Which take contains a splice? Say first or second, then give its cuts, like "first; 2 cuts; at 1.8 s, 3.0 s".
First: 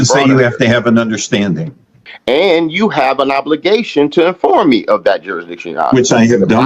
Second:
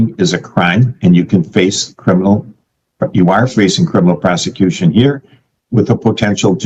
first; 1 cut; at 2.1 s